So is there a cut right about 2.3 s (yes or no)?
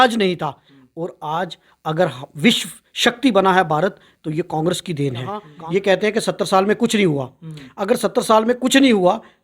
no